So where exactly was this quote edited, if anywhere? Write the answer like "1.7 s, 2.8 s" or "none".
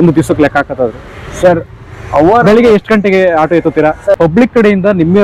4.2 s

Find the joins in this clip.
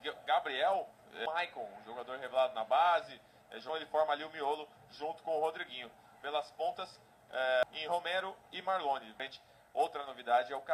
1.2 s, 3.6 s, 7.6 s, 9.2 s

